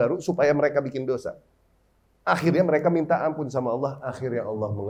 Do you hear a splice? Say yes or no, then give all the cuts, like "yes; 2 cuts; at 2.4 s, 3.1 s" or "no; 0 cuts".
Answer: no; 0 cuts